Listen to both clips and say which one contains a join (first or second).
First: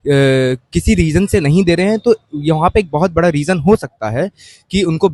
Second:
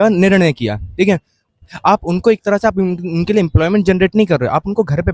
second